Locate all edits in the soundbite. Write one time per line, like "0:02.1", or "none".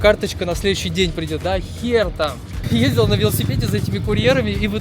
0:02.6

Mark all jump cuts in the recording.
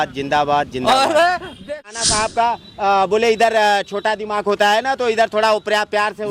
0:01.9

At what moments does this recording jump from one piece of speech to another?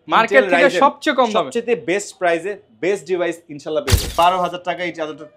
0:04.1

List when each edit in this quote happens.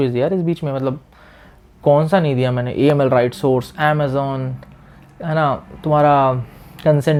none

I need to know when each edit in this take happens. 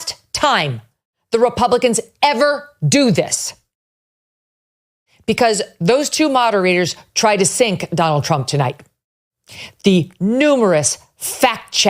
0:09.6

